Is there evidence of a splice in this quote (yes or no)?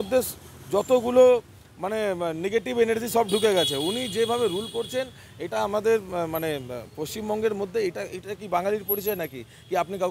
no